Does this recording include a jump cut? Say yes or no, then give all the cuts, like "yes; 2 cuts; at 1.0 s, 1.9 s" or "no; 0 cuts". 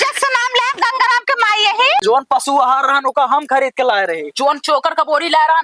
yes; 1 cut; at 2.0 s